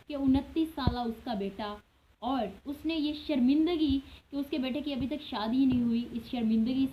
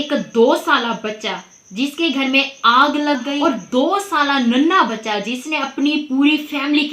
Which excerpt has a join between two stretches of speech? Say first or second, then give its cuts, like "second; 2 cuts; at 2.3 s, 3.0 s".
second; 1 cut; at 3.4 s